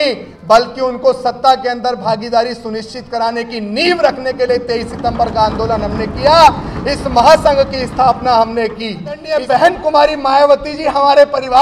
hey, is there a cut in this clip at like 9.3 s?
yes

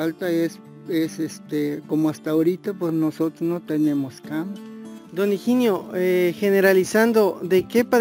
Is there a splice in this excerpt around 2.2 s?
no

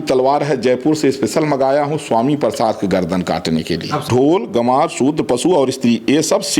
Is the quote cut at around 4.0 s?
yes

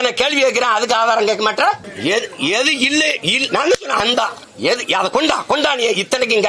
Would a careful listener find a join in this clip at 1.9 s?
yes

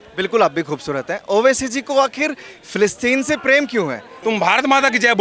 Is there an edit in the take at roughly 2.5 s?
no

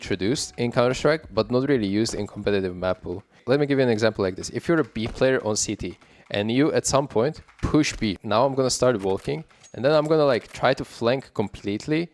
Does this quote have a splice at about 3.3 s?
yes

